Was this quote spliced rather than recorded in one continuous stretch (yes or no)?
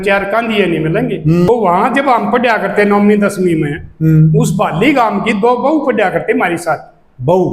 yes